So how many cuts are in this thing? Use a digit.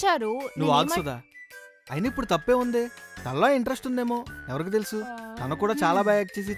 0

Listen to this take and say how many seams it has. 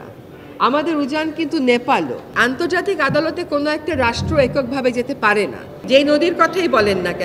2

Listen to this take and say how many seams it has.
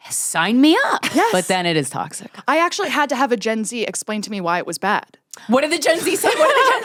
0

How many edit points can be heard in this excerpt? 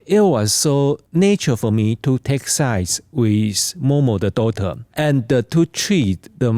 1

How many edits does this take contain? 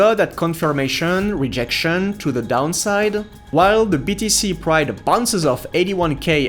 1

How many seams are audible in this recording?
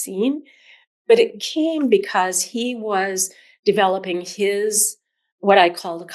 0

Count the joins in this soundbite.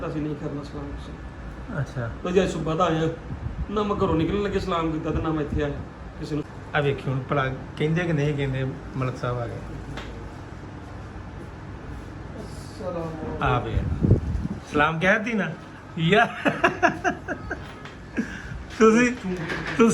1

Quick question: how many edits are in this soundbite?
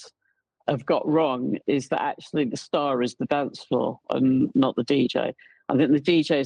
0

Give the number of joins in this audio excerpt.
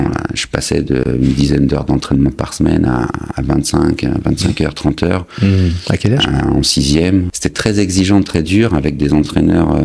1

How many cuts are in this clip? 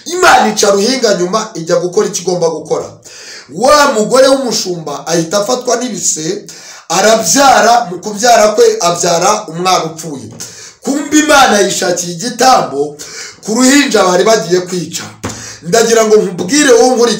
0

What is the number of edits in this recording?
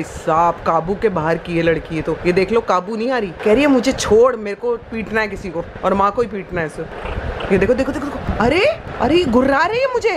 2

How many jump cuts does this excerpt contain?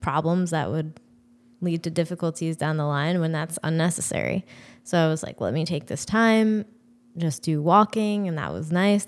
0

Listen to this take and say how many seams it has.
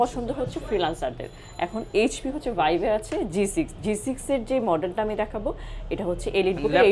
0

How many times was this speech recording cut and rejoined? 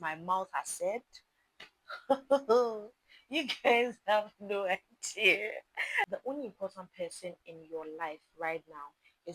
1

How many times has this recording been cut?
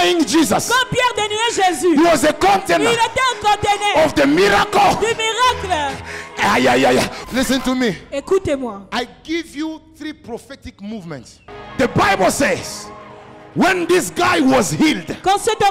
2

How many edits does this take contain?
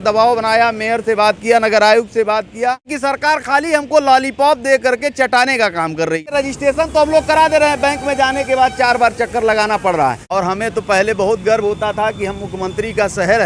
3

